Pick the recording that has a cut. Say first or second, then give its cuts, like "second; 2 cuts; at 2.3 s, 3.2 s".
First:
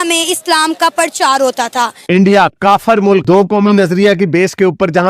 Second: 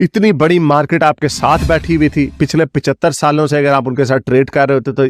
first; 1 cut; at 2.0 s